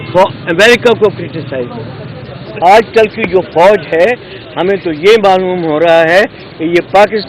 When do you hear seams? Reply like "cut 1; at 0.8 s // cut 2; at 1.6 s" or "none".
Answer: cut 1; at 2.6 s